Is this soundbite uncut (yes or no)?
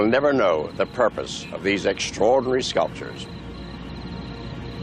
no